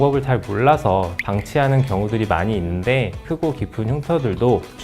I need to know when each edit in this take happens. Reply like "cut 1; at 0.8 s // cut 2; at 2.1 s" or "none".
cut 1; at 1.2 s // cut 2; at 3.2 s